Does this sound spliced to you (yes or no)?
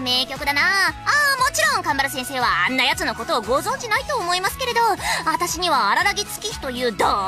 no